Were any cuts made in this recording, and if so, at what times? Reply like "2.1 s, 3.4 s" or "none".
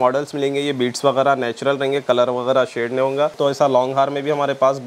3.3 s